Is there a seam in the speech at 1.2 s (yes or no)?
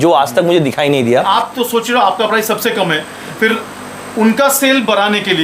yes